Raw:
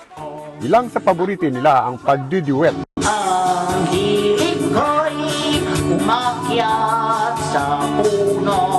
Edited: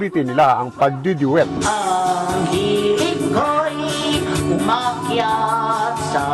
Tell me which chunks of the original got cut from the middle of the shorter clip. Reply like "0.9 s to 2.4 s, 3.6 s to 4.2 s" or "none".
2.8 s to 3.0 s

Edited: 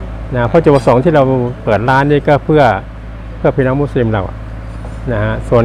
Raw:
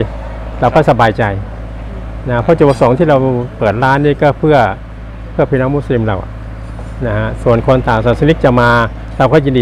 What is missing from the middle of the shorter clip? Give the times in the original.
none

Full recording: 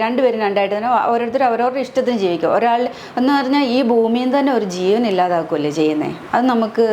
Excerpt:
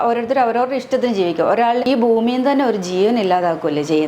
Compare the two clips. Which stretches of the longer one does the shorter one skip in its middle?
2.9 s to 3.7 s

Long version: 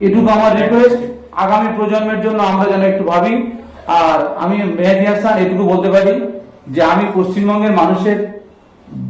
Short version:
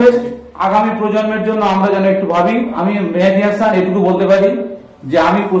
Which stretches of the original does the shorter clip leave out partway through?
3.5 s to 4.4 s

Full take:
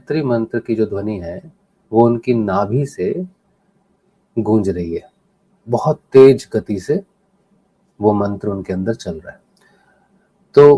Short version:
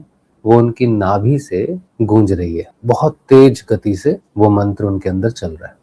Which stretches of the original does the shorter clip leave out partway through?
3.3 s to 4.2 s, 5.0 s to 5.5 s, 7.1 s to 7.9 s

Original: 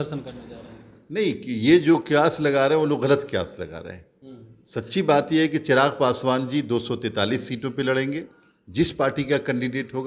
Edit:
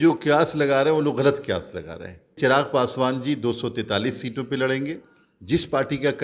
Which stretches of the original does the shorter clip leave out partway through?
4.2 s to 5.6 s

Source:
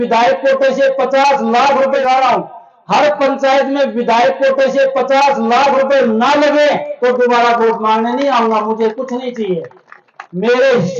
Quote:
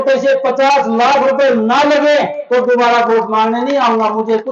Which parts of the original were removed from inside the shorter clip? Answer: 1.9 s to 5.9 s

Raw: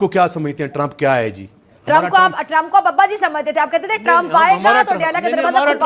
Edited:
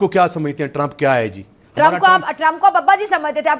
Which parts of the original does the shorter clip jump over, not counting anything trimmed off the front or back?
1.1 s to 1.3 s

